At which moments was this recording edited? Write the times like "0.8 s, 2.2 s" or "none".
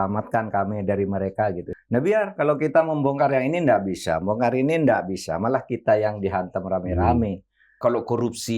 1.6 s, 7.8 s